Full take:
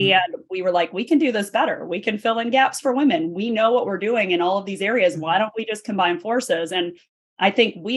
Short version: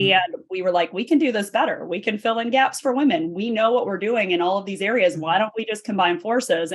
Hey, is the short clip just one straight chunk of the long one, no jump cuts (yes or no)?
yes